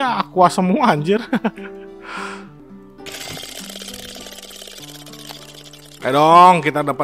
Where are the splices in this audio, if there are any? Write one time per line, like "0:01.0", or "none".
0:02.6